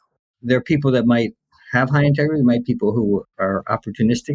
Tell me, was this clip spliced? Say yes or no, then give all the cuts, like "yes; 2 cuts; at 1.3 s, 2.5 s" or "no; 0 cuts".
yes; 1 cut; at 3.3 s